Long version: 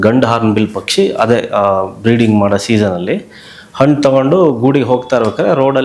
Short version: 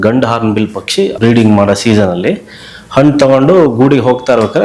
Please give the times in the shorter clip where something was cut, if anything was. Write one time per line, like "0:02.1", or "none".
0:01.1